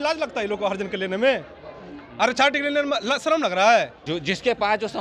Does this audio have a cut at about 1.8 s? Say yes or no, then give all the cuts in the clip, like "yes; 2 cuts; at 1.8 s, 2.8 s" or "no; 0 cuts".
no; 1 cut; at 4.0 s